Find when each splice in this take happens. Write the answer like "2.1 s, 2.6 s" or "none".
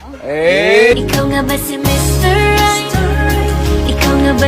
1.0 s